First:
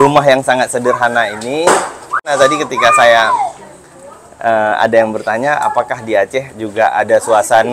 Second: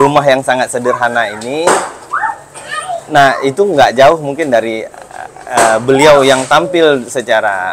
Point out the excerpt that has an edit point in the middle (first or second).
first